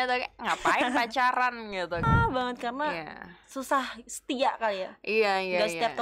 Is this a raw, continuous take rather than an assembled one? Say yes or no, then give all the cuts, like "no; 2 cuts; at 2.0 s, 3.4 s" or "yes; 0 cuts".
no; 1 cut; at 2.0 s